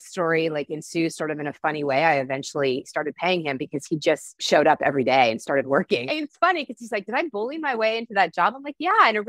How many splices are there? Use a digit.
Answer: 3